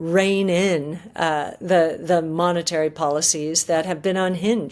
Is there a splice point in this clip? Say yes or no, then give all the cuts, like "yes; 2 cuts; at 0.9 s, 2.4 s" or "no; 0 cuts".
no; 0 cuts